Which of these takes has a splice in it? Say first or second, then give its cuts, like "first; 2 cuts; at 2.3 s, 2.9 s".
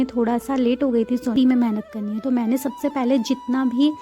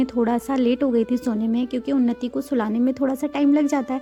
first; 1 cut; at 1.3 s